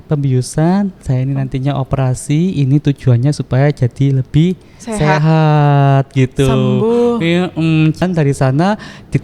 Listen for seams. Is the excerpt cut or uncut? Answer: cut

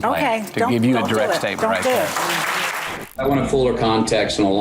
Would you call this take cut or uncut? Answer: cut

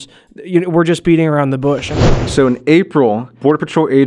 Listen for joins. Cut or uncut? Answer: cut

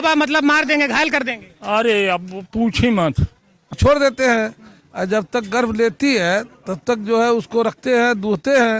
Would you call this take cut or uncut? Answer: cut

